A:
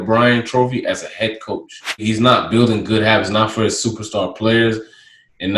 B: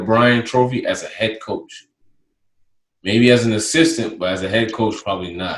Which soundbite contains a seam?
A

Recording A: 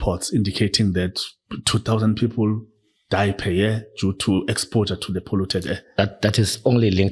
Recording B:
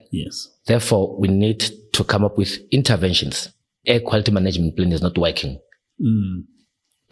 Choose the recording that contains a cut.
B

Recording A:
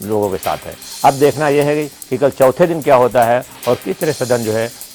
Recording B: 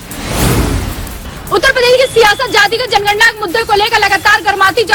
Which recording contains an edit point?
B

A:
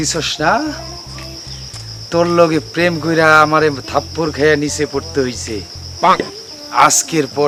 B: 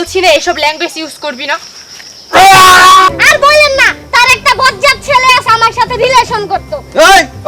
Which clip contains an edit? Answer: B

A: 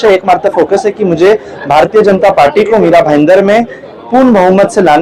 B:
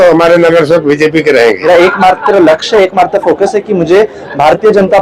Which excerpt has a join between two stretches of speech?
B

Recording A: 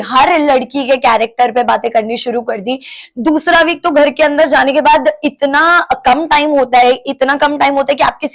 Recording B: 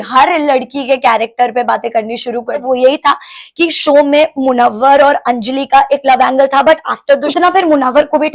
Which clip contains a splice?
B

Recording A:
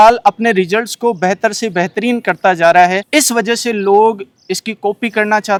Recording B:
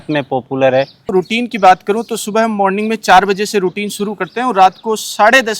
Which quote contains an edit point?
B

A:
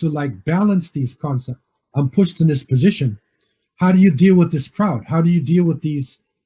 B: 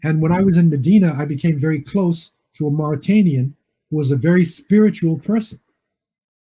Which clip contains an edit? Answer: A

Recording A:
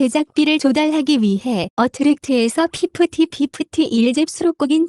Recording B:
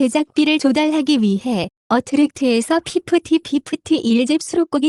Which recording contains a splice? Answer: A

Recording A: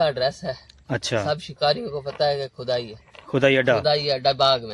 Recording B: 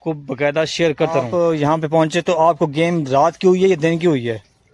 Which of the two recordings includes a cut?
B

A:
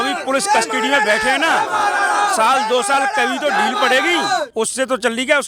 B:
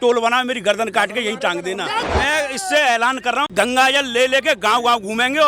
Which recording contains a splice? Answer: B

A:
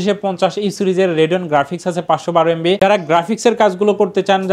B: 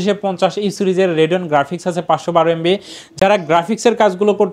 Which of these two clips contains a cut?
A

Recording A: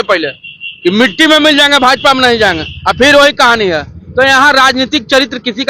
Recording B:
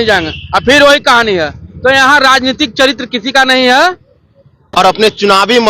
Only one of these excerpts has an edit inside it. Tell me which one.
B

